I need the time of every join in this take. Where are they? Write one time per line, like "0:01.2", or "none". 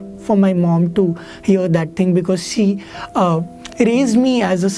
none